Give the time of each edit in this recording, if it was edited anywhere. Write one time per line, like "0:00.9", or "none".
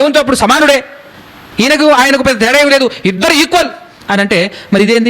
none